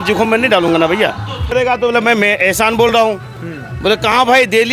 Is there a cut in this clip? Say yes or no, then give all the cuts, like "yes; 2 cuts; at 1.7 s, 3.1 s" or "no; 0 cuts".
yes; 1 cut; at 1.5 s